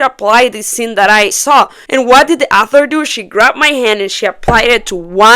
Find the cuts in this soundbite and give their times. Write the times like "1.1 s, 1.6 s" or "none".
1.4 s